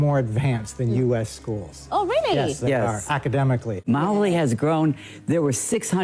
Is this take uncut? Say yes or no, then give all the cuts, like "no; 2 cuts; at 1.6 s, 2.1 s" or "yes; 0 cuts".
no; 1 cut; at 3.8 s